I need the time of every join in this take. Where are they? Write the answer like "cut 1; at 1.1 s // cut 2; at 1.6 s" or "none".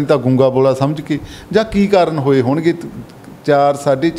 none